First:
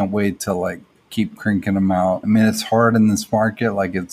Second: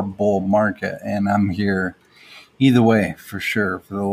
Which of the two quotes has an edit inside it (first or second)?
first